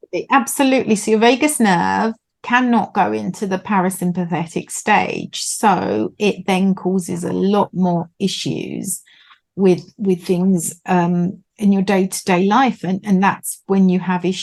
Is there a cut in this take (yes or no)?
no